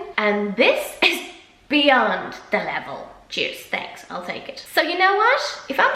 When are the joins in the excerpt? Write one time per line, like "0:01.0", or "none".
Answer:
0:03.1
0:04.6